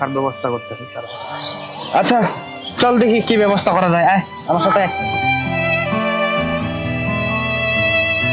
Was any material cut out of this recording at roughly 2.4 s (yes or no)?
no